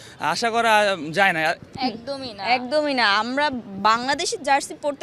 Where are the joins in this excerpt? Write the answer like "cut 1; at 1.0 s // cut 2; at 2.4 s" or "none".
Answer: cut 1; at 1.6 s